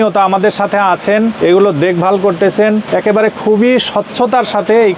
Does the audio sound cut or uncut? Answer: cut